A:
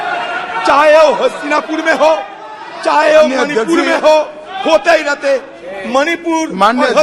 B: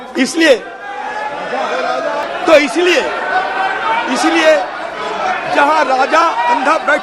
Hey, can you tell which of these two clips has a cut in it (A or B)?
B